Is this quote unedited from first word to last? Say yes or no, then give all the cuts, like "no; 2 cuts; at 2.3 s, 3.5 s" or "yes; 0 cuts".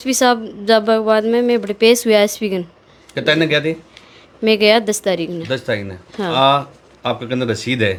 yes; 0 cuts